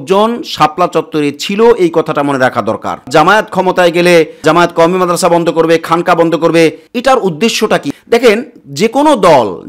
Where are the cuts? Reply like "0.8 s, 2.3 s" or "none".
3.1 s, 4.4 s, 6.9 s, 7.9 s